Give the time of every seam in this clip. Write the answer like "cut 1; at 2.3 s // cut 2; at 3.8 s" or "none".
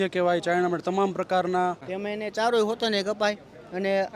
cut 1; at 1.9 s